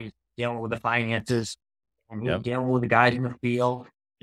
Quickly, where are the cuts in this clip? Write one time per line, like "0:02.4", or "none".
none